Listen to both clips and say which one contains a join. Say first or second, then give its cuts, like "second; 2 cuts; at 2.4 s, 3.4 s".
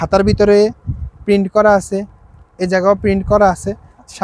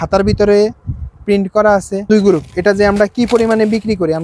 second; 1 cut; at 2.1 s